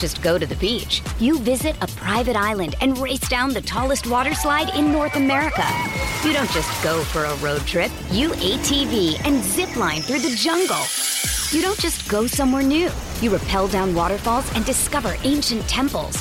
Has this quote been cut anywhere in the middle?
no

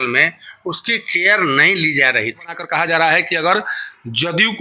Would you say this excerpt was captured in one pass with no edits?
no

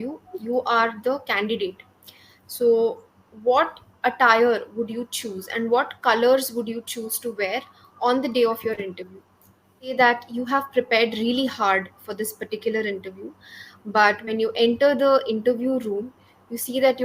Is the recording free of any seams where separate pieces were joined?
no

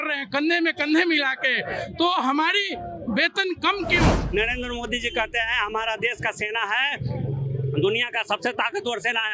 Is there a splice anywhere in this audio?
yes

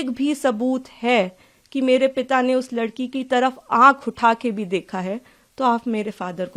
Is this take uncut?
yes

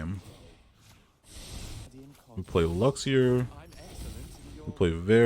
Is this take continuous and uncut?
no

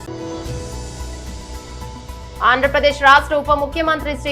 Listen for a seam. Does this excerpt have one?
yes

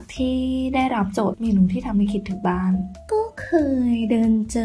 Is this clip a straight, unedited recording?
no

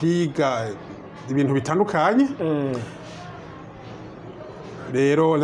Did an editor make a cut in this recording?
no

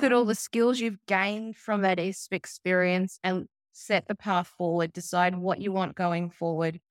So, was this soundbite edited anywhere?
no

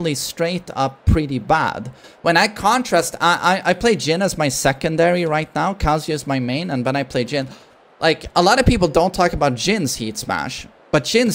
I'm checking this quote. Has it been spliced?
no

